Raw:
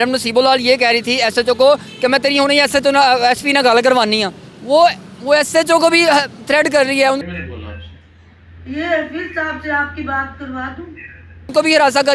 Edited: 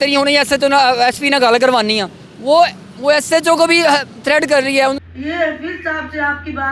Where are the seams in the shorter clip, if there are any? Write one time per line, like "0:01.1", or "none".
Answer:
0:05.1